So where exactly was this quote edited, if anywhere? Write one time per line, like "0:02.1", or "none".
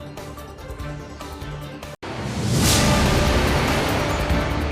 0:02.0